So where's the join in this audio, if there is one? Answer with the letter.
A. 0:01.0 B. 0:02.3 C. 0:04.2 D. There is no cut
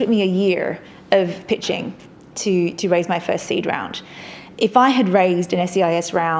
D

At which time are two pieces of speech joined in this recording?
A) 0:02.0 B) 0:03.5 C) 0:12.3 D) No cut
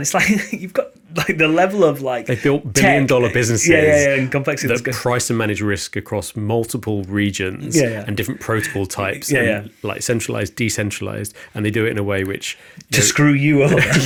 D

